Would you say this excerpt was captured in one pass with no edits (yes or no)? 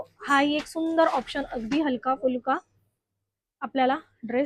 yes